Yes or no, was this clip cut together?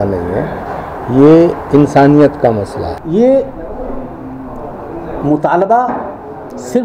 yes